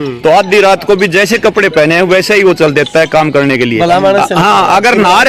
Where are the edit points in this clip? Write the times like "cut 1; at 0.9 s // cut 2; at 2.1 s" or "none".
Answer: none